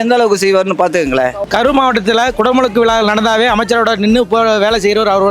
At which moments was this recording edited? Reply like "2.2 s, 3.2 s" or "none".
1.4 s